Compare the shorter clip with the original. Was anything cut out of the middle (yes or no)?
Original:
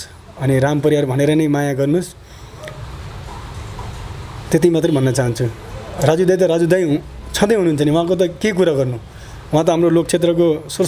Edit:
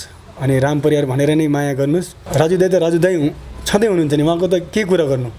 yes